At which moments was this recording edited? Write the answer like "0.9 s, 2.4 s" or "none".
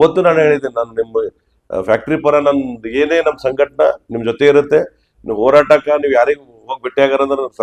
none